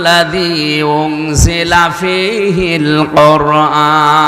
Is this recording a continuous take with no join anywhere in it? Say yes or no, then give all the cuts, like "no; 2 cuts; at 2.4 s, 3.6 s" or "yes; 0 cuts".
yes; 0 cuts